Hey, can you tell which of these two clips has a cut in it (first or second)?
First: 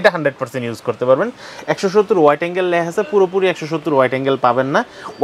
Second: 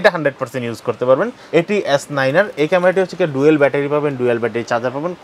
second